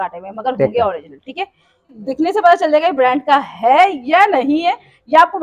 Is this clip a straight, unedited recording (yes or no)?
no